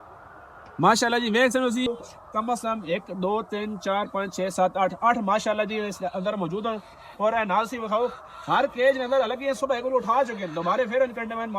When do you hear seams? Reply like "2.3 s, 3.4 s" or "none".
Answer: 1.9 s